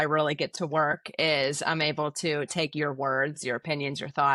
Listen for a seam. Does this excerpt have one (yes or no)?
no